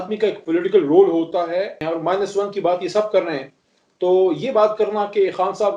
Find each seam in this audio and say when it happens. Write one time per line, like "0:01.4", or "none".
0:01.8